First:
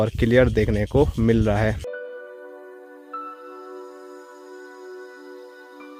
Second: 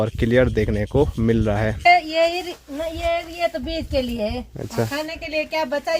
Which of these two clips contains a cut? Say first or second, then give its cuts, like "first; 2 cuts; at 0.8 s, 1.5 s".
second; 1 cut; at 1.9 s